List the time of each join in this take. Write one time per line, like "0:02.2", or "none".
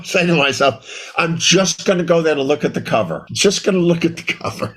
0:03.2